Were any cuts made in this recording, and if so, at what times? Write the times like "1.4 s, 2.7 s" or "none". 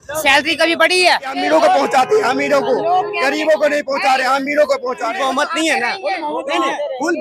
1.4 s, 5.1 s